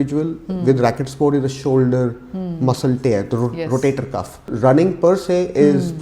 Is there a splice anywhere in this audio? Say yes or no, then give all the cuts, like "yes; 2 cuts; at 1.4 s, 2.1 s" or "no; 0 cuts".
yes; 1 cut; at 4.4 s